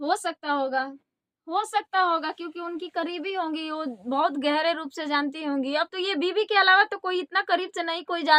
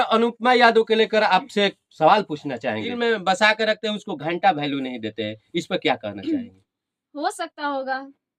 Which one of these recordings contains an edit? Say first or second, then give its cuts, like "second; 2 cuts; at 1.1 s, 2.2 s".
second; 1 cut; at 2.9 s